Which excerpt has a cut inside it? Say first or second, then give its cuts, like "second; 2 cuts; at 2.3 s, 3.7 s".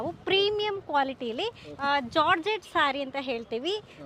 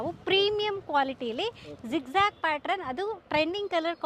first; 1 cut; at 1.6 s